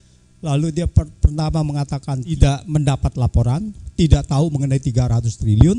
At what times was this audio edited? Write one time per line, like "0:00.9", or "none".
0:02.3